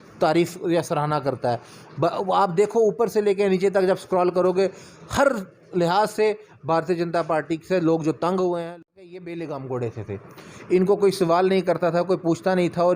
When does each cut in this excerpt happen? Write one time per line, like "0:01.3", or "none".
0:08.6